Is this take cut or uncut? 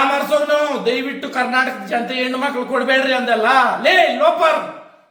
uncut